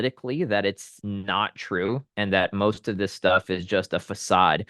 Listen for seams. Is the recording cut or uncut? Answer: cut